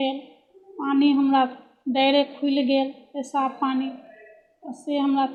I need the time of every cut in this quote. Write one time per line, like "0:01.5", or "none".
none